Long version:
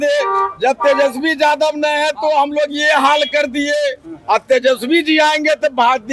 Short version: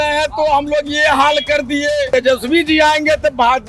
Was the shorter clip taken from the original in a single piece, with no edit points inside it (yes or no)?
no